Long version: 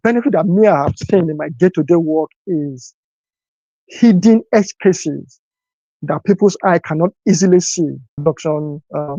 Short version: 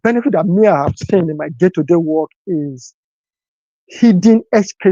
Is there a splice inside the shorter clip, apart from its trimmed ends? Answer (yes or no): no